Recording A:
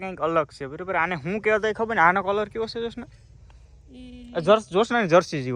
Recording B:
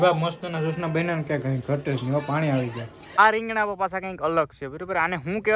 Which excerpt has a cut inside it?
B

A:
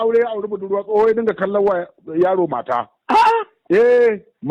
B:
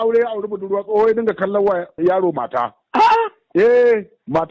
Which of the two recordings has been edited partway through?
B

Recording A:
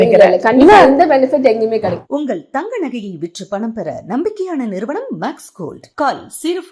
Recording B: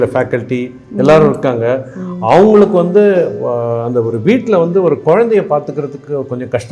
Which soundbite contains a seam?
A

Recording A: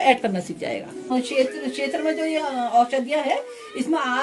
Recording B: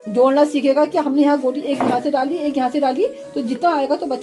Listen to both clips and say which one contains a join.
A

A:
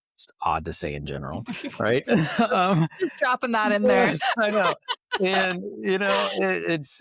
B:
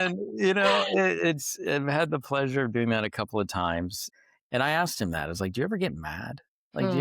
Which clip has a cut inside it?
B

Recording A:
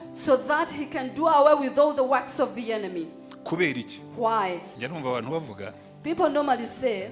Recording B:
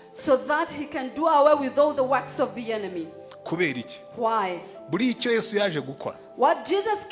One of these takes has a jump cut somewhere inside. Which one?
A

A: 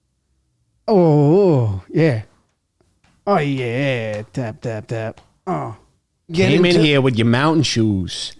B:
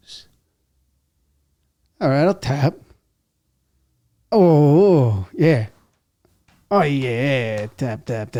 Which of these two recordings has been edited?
A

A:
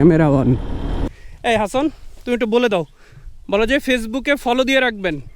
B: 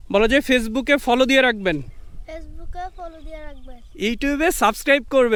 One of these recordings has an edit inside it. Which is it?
A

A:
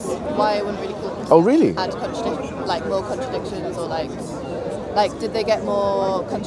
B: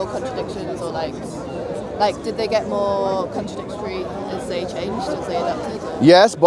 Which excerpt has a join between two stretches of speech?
A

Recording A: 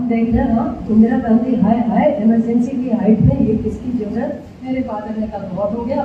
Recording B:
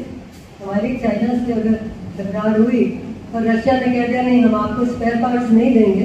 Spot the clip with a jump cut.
A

